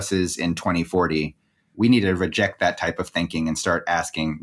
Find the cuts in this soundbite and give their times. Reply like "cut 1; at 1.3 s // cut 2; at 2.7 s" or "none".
cut 1; at 1.7 s